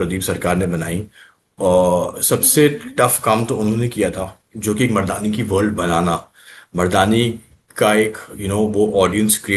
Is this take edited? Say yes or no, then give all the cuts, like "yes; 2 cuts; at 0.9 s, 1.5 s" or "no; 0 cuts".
no; 0 cuts